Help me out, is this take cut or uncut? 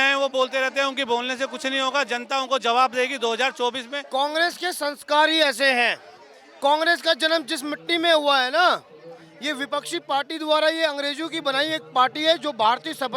cut